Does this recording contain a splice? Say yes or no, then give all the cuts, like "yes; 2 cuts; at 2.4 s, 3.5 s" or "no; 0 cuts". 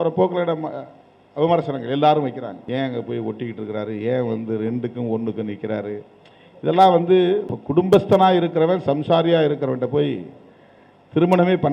yes; 2 cuts; at 2.6 s, 7.6 s